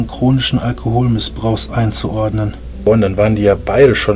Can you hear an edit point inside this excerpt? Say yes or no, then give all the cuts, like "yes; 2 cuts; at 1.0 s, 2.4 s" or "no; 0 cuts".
yes; 1 cut; at 2.8 s